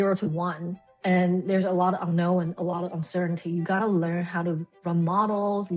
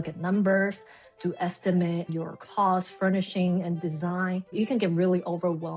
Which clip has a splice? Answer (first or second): second